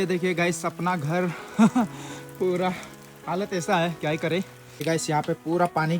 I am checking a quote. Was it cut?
yes; 1 cut; at 4.8 s

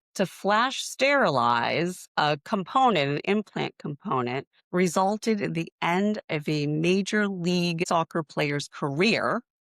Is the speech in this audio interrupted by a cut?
yes; 1 cut; at 7.8 s

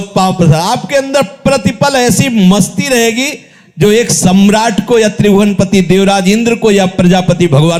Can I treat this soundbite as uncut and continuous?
yes; 0 cuts

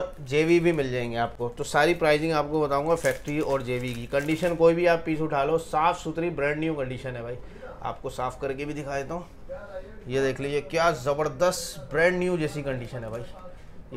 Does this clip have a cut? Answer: no; 0 cuts

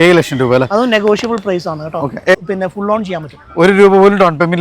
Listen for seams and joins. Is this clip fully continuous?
no; 1 cut; at 2.3 s

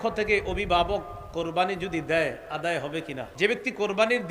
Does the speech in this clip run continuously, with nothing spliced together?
no; 1 cut; at 3.2 s

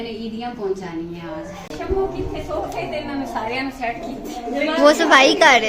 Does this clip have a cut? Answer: yes; 1 cut; at 1.7 s

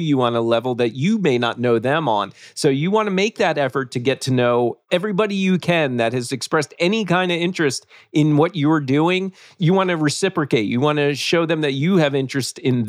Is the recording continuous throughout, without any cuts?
no; 2 cuts; at 4.8 s, 9.5 s

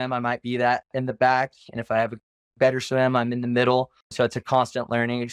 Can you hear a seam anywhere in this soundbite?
yes; 1 cut; at 4.0 s

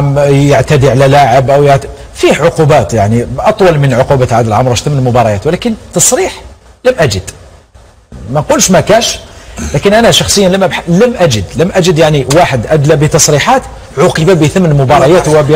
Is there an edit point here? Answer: no; 0 cuts

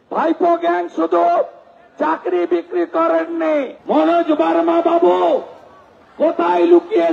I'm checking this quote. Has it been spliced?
yes; 1 cut; at 3.8 s

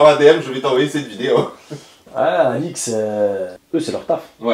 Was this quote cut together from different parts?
yes; 1 cut; at 3.6 s

